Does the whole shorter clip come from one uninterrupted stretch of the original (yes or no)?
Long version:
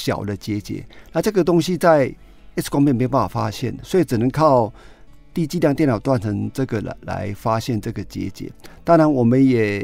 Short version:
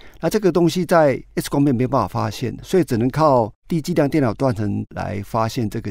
no